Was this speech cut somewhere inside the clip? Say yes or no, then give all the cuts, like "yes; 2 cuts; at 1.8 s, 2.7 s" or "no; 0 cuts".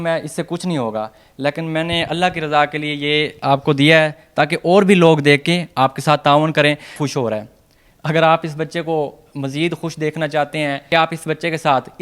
yes; 2 cuts; at 7.0 s, 10.8 s